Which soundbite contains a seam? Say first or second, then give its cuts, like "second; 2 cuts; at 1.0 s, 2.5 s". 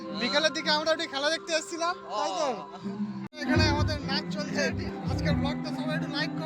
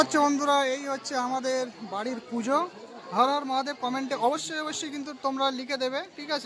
first; 2 cuts; at 3.2 s, 4.9 s